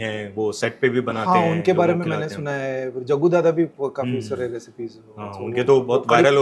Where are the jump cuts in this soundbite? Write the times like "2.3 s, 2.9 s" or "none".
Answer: none